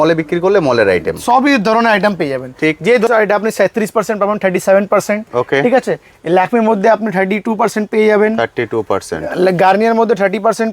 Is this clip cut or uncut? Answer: cut